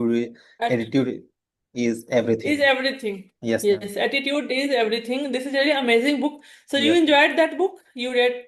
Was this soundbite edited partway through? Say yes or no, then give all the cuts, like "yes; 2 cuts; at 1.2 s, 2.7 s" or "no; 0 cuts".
no; 0 cuts